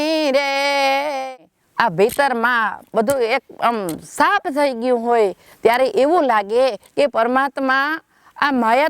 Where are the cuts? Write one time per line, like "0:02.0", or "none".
0:01.2